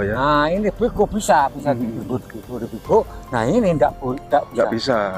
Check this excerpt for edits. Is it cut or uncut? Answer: uncut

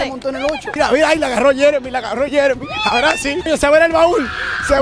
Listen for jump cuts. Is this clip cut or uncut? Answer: cut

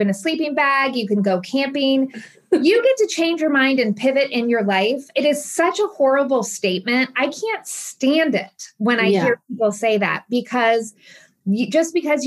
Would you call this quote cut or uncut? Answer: cut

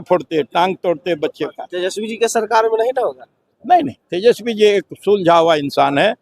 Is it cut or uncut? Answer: uncut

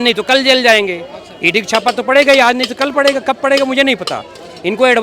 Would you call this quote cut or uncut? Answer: uncut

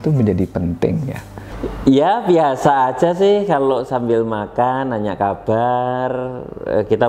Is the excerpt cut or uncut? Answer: cut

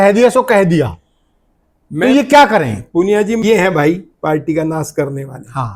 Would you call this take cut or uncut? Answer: cut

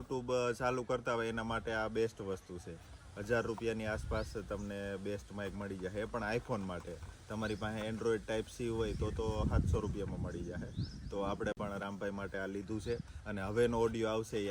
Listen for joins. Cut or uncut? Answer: uncut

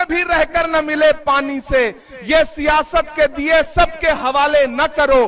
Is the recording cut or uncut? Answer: uncut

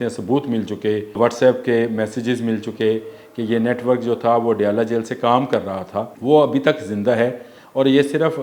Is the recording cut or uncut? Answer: cut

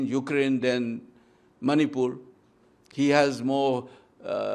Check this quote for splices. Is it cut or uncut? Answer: uncut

